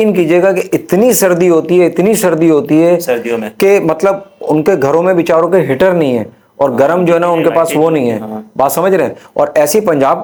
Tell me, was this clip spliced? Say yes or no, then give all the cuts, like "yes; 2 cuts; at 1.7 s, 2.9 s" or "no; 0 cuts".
no; 0 cuts